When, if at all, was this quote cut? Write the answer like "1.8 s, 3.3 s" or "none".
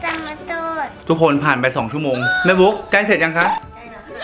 1.0 s